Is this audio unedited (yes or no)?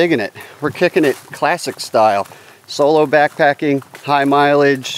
yes